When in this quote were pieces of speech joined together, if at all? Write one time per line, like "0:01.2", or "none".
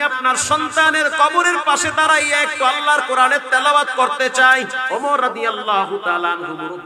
0:04.8